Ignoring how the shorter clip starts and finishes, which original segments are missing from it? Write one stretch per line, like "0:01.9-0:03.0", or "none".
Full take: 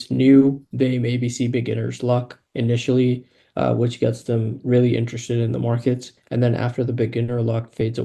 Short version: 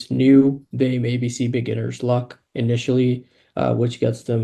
none

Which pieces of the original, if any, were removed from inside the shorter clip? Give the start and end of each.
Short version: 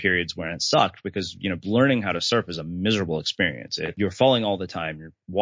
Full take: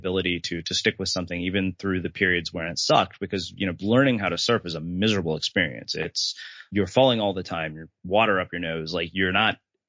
0:06.1-0:06.7

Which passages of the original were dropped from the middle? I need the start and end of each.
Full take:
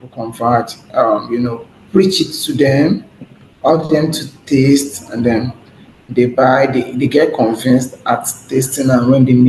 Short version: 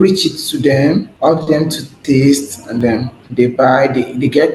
0:03.6-0:04.1
0:05.3-0:05.7

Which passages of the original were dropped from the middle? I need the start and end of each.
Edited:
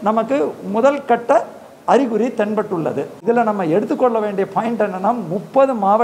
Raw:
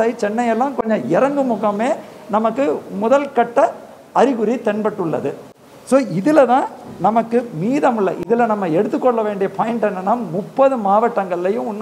0:05.4-0:08.2

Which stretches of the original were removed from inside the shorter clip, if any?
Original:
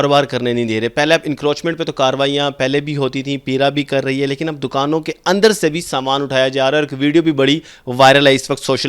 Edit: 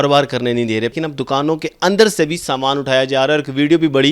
0:00.9-0:04.4

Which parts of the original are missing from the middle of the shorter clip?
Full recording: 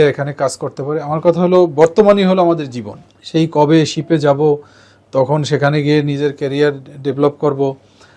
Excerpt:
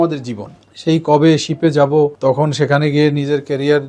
0:04.6-0:05.1

